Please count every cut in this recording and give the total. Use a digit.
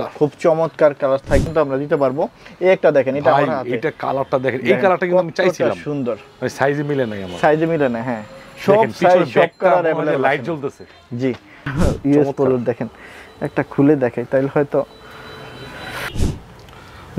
3